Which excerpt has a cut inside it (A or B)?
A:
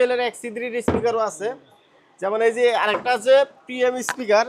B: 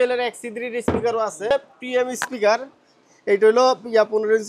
B